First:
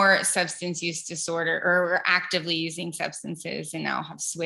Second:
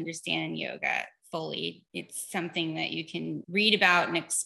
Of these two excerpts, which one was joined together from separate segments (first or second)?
second